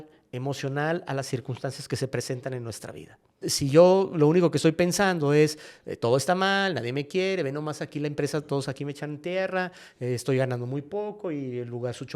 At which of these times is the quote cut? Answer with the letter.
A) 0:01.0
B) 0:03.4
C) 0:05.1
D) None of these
B